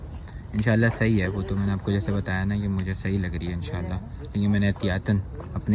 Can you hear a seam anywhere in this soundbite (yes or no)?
no